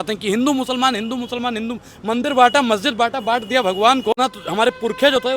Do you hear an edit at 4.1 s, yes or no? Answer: yes